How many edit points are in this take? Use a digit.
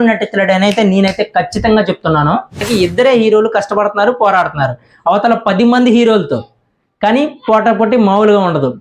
1